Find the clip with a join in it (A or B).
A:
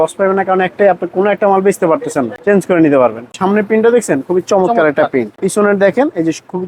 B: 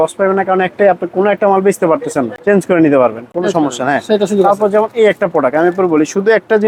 A